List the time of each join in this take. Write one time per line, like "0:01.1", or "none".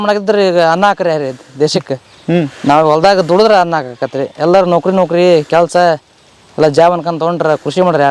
none